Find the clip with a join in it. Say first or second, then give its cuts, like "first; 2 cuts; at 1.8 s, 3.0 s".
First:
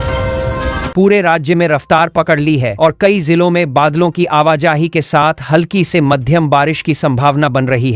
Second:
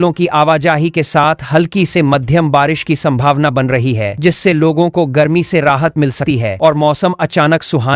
first; 1 cut; at 0.9 s